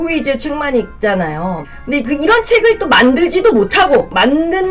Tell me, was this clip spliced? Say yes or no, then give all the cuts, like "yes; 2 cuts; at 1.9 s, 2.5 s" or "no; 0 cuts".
no; 0 cuts